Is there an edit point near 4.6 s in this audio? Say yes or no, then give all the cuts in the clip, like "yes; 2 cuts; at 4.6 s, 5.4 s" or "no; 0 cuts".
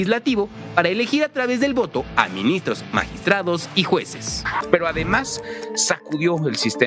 yes; 1 cut; at 4.6 s